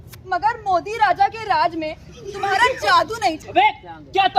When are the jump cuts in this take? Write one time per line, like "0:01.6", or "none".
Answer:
0:03.4